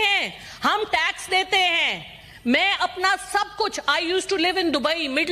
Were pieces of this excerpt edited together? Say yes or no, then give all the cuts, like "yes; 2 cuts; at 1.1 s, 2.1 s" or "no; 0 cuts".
no; 0 cuts